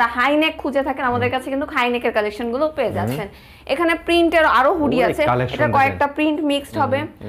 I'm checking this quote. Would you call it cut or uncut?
uncut